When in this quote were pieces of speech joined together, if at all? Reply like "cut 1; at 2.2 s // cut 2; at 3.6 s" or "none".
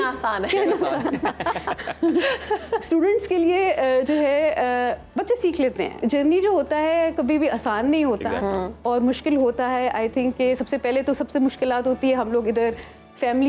cut 1; at 6.0 s